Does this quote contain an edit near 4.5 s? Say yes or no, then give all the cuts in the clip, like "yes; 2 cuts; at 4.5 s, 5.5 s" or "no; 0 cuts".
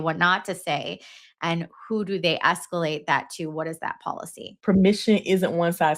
yes; 1 cut; at 4.5 s